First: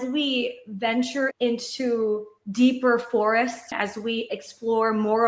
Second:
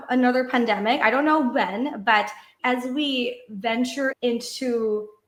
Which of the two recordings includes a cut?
first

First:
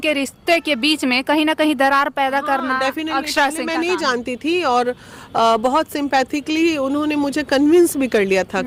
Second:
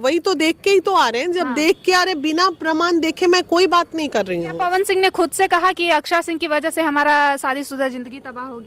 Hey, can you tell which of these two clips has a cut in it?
second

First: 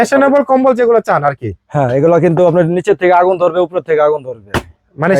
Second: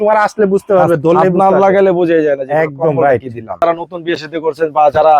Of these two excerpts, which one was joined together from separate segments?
second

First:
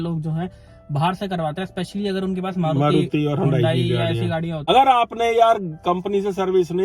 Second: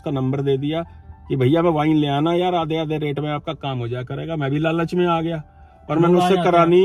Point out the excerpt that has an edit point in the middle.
first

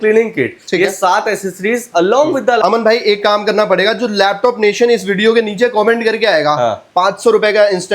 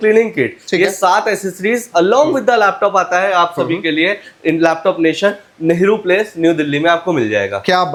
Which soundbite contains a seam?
first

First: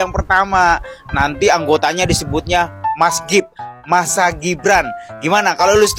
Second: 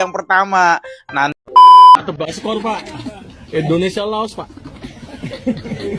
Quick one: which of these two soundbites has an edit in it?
second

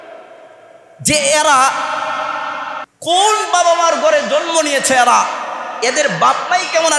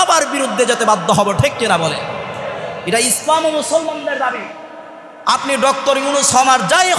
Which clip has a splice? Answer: first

